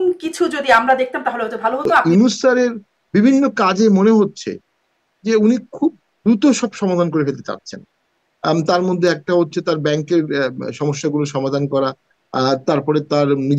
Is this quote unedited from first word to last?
no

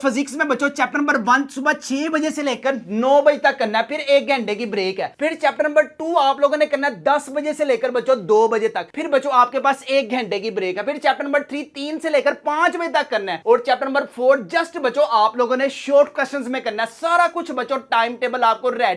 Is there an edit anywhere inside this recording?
no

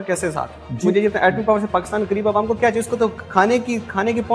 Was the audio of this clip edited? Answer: no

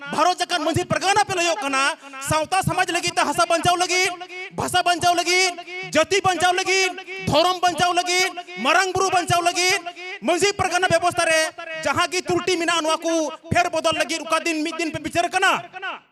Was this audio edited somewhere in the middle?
no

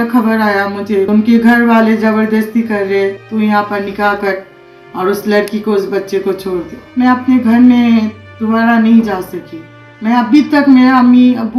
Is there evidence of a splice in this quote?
yes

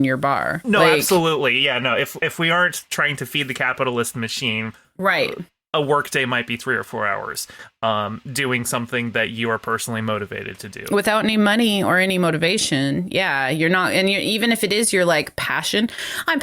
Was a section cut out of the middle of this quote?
yes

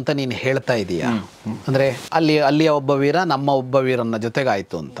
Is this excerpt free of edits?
yes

